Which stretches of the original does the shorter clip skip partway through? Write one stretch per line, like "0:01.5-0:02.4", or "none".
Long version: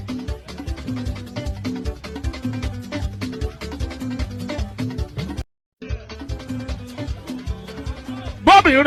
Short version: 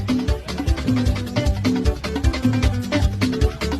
none